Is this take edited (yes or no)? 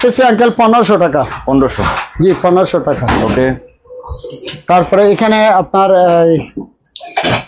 no